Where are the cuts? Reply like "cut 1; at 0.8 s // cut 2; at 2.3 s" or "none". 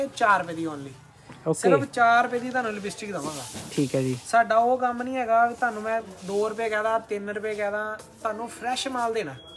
none